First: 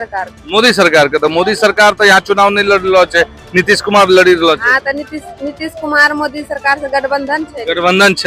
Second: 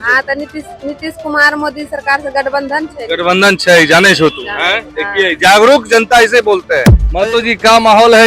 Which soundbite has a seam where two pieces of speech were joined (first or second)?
second